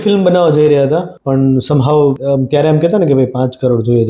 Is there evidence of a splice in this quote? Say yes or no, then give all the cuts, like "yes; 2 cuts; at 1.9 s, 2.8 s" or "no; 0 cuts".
yes; 2 cuts; at 1.1 s, 2.2 s